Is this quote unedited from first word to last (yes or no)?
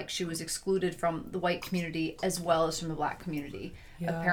yes